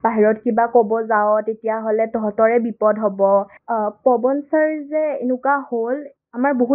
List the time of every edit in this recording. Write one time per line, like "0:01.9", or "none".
0:03.6